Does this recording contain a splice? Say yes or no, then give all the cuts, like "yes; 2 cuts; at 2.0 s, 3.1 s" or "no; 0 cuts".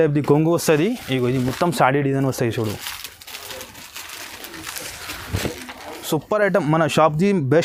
no; 0 cuts